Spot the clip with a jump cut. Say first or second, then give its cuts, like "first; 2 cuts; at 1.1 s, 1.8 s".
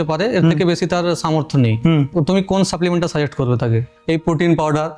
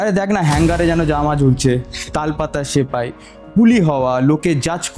first; 2 cuts; at 2.1 s, 3.9 s